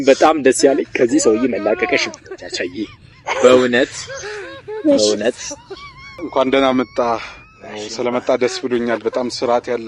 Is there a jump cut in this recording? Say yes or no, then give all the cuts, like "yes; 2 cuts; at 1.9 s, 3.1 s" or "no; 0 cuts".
yes; 1 cut; at 6.2 s